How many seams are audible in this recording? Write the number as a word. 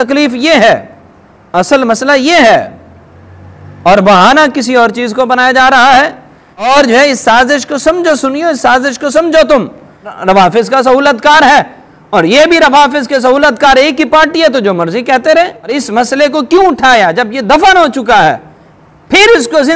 three